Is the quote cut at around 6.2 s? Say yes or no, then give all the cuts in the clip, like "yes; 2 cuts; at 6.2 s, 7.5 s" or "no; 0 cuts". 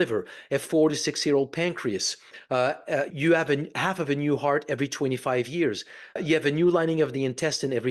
yes; 2 cuts; at 3.1 s, 6.2 s